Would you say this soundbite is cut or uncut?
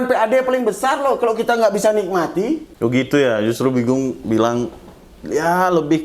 cut